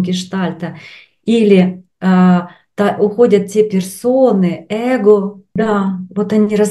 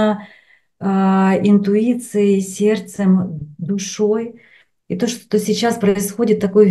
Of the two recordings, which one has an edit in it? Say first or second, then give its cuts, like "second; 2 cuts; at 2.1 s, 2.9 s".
first; 1 cut; at 5.4 s